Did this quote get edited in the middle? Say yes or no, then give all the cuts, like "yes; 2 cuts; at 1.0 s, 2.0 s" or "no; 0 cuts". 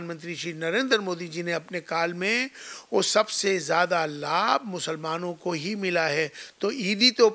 no; 0 cuts